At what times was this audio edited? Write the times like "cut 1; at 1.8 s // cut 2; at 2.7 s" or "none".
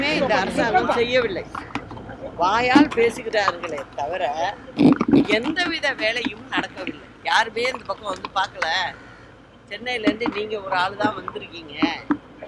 cut 1; at 7.2 s